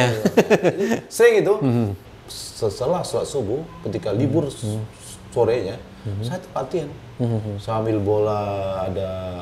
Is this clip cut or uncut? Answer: cut